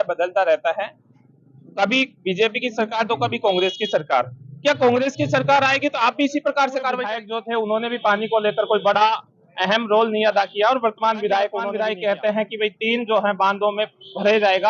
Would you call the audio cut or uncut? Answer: cut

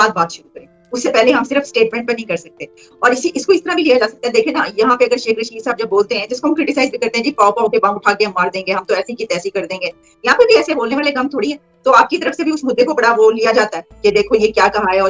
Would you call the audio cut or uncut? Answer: uncut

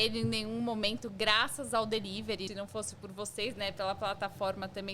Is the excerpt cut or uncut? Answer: cut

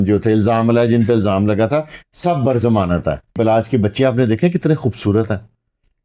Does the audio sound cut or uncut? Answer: cut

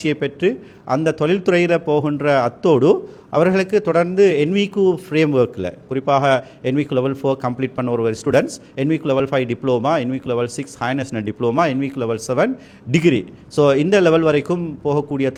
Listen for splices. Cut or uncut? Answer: uncut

